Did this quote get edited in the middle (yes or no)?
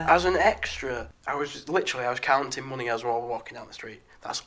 yes